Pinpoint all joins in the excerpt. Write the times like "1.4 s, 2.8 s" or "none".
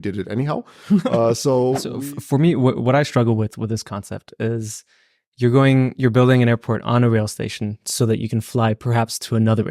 1.9 s